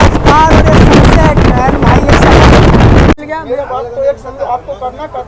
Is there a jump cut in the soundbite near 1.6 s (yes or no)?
no